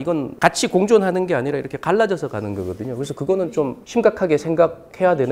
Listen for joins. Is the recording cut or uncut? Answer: cut